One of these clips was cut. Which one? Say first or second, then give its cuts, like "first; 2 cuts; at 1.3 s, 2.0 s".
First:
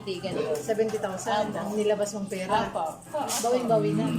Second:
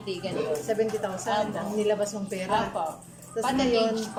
first; 1 cut; at 3.1 s